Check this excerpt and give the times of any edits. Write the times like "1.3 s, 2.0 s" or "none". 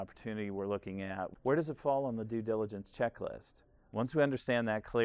1.3 s